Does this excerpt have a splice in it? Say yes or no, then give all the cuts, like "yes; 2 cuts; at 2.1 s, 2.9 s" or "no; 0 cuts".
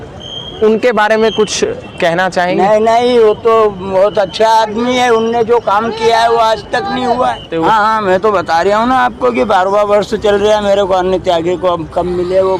yes; 1 cut; at 7.5 s